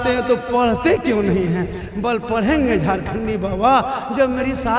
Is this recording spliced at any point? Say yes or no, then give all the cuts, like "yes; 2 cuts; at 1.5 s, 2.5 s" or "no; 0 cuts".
no; 0 cuts